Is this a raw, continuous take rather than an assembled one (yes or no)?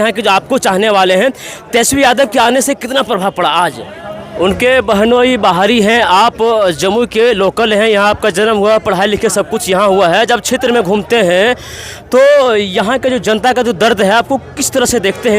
no